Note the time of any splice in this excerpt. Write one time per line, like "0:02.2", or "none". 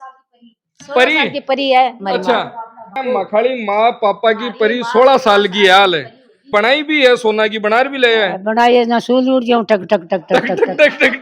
0:03.0
0:06.4